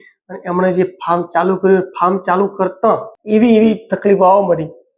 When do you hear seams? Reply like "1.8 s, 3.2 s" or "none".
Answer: 3.1 s